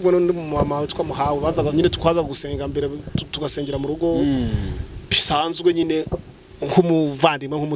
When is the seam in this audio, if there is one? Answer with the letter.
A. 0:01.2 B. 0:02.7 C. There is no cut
C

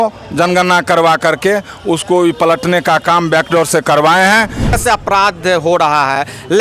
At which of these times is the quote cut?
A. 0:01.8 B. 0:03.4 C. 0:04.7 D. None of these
C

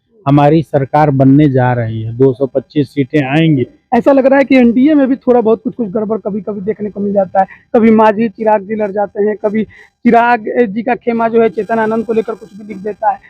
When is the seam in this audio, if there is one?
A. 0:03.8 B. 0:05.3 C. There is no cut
A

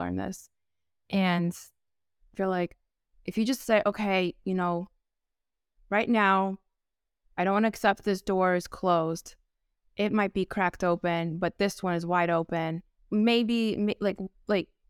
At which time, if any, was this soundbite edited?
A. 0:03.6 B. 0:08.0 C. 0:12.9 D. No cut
C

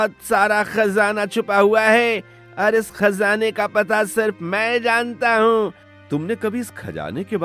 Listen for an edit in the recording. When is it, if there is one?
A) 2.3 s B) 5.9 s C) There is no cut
B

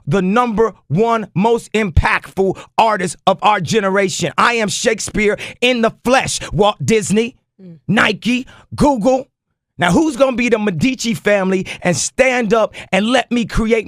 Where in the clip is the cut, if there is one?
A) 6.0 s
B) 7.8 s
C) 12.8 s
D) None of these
D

